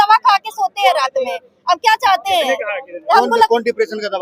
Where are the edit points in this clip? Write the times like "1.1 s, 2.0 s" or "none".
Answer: none